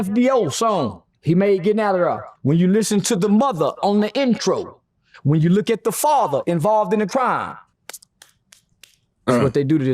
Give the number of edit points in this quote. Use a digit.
2